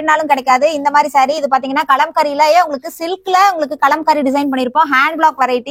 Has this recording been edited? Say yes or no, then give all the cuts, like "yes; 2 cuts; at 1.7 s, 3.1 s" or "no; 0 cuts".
no; 0 cuts